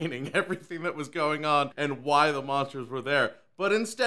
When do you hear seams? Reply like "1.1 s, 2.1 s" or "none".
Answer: 1.7 s